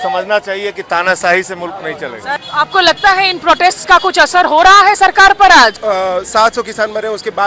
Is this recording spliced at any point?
yes; 2 cuts; at 2.4 s, 5.8 s

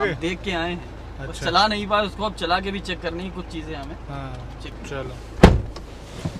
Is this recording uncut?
yes; 0 cuts

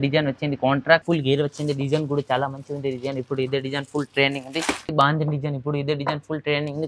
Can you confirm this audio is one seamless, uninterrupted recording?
no; 2 cuts; at 1.0 s, 4.9 s

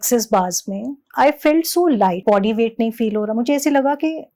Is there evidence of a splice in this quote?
yes; 2 cuts; at 1.0 s, 2.2 s

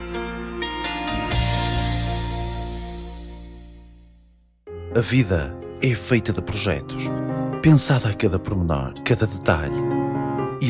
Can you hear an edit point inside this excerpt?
yes; 1 cut; at 4.7 s

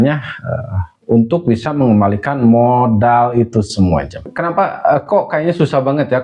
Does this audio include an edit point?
yes; 1 cut; at 4.3 s

